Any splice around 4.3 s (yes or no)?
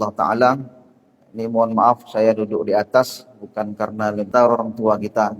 yes